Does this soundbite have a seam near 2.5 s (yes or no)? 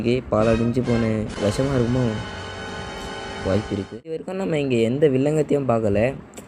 no